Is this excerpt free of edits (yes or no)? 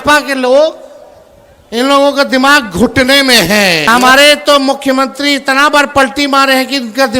no